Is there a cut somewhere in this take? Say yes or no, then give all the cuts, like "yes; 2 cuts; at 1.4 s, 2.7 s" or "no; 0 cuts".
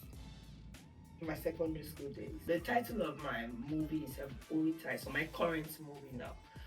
yes; 1 cut; at 2.4 s